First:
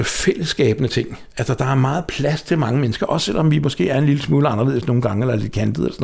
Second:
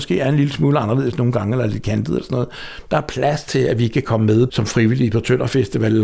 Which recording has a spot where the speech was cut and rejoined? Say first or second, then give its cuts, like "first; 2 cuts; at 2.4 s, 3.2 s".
second; 1 cut; at 4.5 s